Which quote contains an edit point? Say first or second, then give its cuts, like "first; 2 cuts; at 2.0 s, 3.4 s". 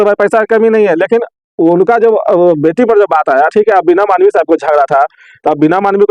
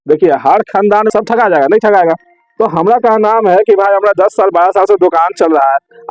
second; 1 cut; at 1.1 s